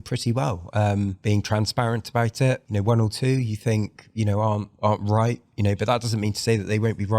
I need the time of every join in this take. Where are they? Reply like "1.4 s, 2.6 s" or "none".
1.2 s, 2.7 s, 4.7 s